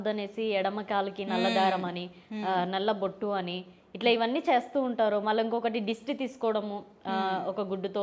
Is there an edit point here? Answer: no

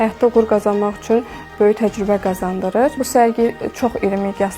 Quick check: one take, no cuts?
no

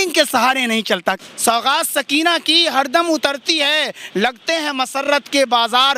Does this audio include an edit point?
yes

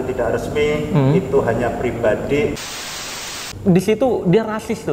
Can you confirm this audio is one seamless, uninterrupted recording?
no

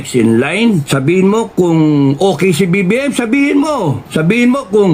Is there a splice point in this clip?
yes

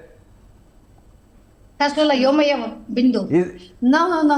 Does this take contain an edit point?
no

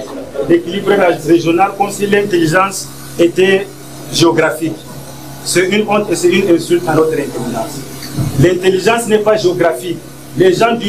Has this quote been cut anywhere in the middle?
no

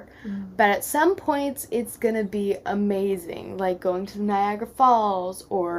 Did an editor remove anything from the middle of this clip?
no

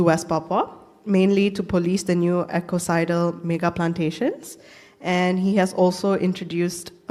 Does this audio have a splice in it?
no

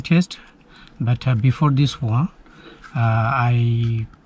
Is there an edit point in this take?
no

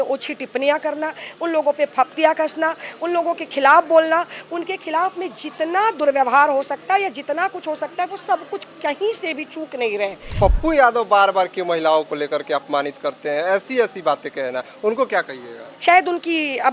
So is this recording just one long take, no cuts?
no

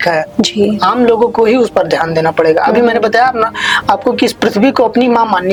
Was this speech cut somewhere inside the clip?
no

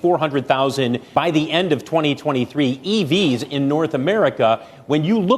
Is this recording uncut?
no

